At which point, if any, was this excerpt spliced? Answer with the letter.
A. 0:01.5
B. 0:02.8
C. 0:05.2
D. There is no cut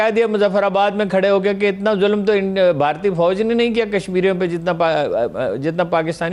D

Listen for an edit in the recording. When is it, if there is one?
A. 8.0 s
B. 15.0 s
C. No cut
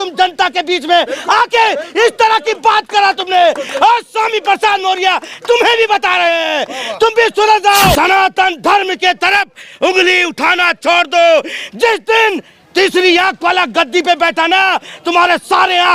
A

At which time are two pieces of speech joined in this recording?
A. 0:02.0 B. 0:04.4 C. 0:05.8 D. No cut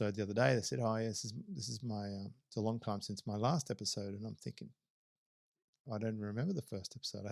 D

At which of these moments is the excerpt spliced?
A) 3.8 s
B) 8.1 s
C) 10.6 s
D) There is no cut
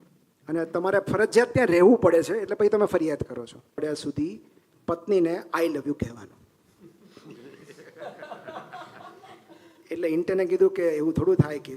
A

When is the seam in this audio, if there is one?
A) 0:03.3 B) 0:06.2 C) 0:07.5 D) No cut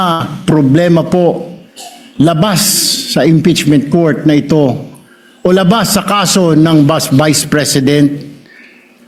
D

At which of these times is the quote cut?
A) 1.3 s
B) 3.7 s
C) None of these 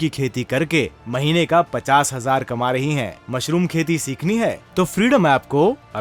C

